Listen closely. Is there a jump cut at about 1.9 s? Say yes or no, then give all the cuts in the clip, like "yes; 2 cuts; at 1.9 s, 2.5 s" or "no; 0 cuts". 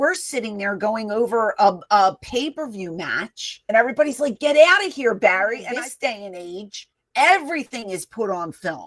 no; 2 cuts; at 3.7 s, 5.7 s